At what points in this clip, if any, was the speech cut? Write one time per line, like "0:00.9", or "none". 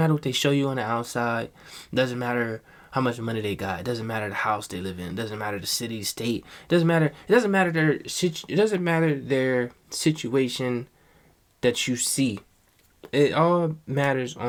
none